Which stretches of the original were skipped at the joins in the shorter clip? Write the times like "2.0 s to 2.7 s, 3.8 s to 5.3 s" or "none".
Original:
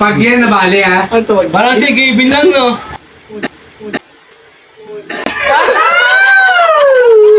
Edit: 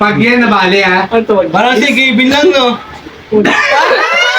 3.4 s to 5.2 s

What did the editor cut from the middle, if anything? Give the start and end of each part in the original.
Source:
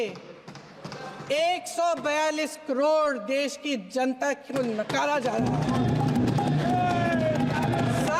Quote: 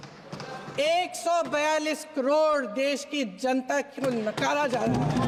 none

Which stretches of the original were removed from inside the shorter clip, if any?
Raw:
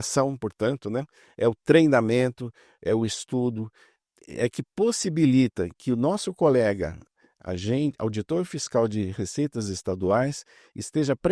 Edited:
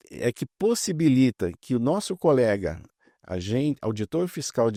none

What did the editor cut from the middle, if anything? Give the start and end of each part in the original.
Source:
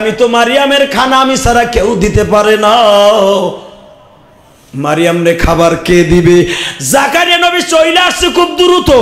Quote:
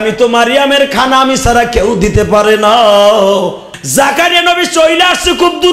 3.7 s to 6.7 s

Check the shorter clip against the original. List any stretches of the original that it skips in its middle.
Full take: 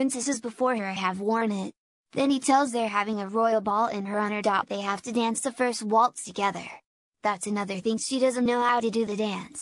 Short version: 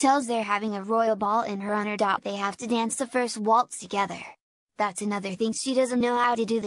none

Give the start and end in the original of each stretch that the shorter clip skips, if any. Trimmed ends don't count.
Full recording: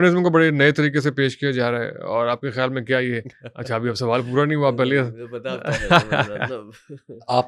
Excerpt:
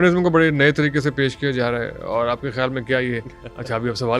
none

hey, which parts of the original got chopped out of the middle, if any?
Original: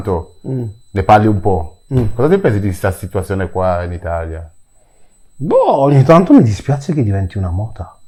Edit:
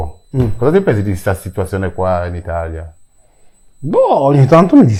none

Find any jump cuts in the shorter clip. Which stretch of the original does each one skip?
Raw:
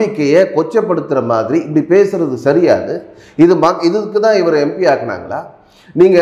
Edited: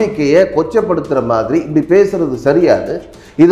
none

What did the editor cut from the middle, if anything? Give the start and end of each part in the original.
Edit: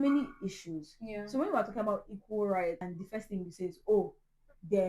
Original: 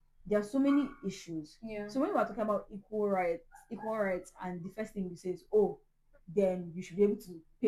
3.5 s to 4.6 s

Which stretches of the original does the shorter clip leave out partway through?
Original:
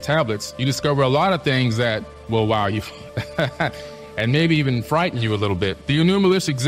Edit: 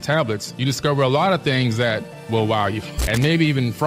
2.9 s to 4.0 s

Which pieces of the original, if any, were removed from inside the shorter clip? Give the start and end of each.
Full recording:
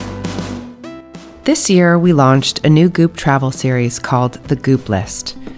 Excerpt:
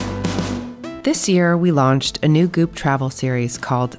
1.0 s to 1.4 s

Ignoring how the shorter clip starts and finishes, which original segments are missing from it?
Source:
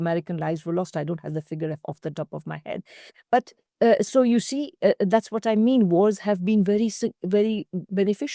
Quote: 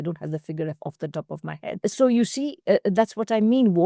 2.9 s to 4.0 s

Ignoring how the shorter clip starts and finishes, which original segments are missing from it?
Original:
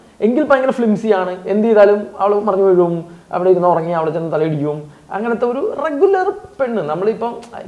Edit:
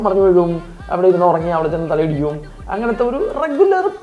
none

